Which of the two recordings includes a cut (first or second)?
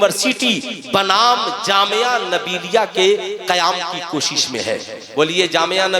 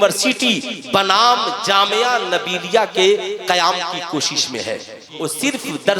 second